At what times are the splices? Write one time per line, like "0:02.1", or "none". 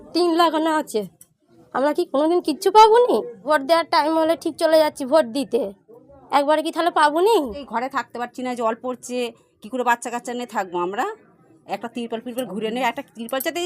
0:03.3
0:07.6